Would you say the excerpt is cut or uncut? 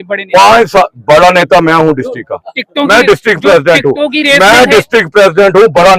uncut